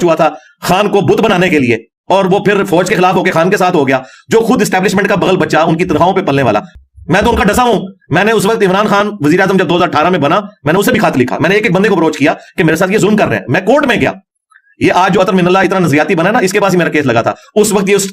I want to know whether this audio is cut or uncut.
cut